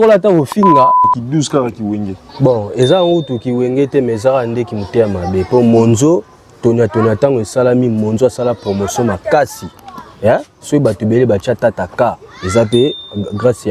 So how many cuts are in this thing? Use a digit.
1